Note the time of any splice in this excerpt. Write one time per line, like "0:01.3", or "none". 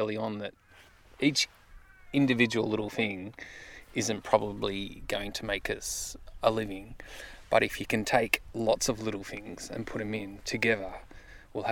none